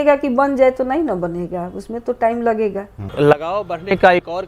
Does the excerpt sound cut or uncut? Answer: cut